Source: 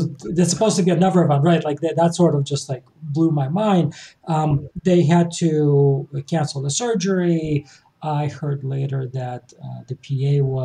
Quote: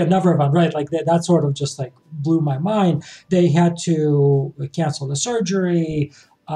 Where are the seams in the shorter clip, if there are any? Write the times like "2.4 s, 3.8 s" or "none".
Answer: 3.1 s